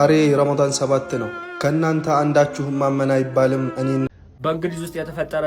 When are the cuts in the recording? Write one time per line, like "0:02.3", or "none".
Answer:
0:04.1